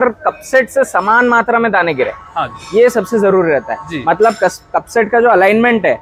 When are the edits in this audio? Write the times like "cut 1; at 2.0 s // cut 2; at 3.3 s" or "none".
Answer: none